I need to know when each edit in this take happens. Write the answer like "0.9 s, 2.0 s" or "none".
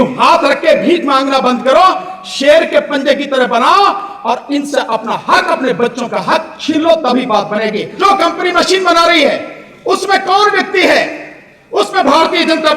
7.9 s